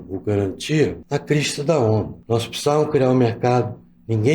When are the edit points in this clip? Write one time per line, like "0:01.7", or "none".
0:01.0
0:02.2